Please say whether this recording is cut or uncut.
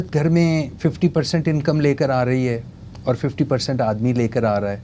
uncut